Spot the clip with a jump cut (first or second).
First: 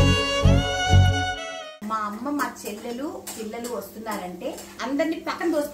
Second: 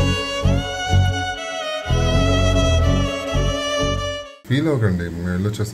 first